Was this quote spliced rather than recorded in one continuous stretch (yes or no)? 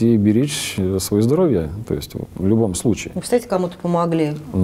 no